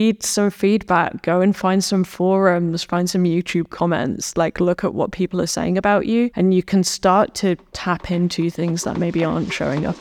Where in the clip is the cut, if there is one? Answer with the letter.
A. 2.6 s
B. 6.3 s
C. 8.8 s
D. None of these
B